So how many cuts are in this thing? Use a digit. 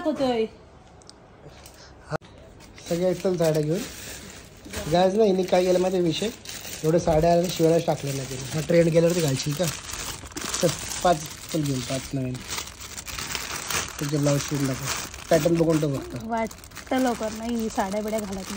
0